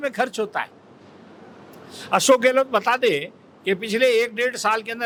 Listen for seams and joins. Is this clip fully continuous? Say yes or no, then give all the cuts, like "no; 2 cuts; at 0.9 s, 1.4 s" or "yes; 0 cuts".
yes; 0 cuts